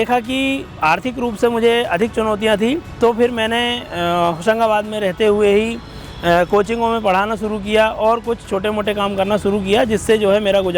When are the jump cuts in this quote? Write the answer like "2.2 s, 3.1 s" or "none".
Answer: none